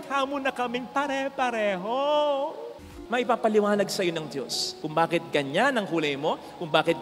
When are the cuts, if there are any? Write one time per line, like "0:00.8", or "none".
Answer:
0:03.0